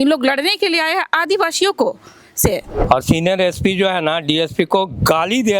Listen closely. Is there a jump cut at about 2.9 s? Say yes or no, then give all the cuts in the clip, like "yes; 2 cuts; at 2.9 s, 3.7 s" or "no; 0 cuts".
yes; 1 cut; at 2.9 s